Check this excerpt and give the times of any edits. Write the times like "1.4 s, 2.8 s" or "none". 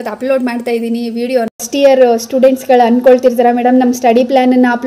1.7 s